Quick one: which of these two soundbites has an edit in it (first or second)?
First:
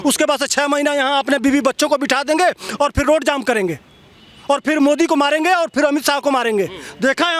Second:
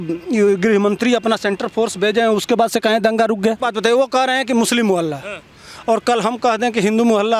second